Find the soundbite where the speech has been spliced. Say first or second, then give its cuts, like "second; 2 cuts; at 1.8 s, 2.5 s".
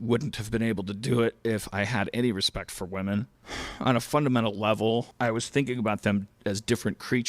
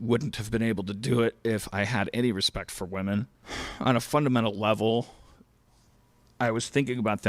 first; 1 cut; at 5.1 s